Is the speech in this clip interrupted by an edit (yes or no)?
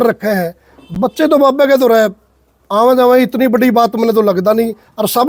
no